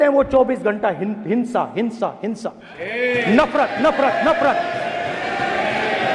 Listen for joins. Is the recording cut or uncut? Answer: uncut